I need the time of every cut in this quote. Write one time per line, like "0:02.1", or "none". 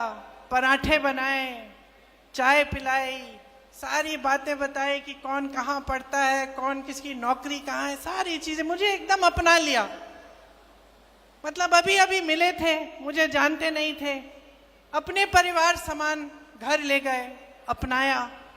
none